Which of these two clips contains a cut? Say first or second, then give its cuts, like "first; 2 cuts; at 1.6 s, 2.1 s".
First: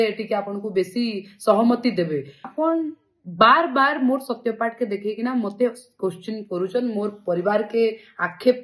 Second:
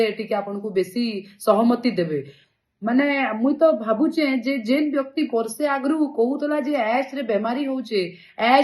first; 1 cut; at 2.5 s